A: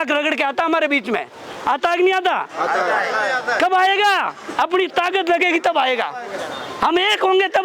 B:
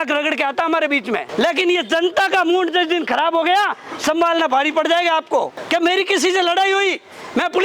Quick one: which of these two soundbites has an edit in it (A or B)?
B